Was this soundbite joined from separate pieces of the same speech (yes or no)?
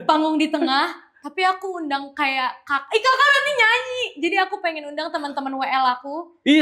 no